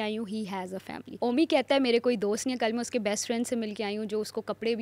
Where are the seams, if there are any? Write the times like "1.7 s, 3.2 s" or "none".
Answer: 1.0 s